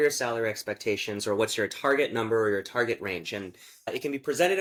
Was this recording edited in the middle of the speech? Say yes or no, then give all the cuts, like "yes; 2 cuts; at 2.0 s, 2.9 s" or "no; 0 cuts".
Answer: no; 0 cuts